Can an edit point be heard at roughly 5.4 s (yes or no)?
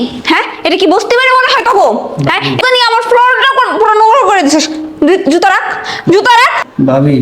no